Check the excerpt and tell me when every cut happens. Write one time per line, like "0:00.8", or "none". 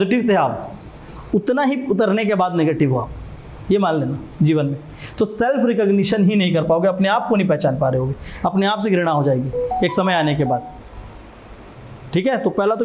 none